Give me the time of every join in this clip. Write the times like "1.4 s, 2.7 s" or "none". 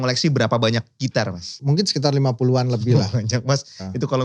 1.5 s, 2.9 s